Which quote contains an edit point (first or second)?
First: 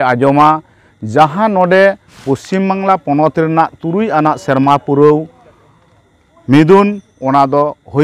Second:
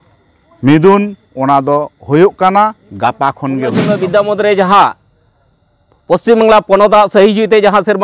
second